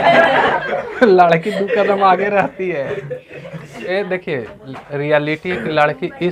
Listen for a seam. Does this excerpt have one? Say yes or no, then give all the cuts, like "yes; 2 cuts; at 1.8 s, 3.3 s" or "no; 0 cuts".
yes; 1 cut; at 3.8 s